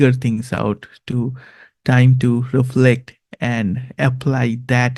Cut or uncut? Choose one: uncut